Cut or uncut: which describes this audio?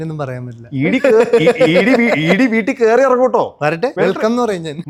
uncut